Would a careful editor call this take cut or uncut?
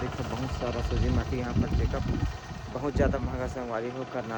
uncut